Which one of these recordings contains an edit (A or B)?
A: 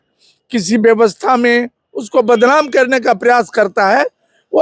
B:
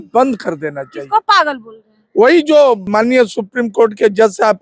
B